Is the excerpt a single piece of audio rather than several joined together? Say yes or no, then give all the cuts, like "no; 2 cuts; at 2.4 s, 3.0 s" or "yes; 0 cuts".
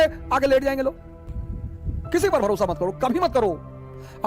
no; 1 cut; at 1.1 s